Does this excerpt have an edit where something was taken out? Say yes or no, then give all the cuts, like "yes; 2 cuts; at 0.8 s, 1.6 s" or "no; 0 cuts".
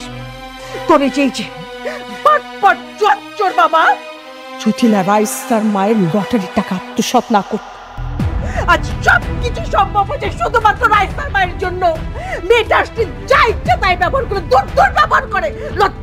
no; 0 cuts